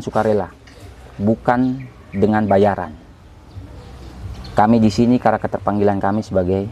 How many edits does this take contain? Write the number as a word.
zero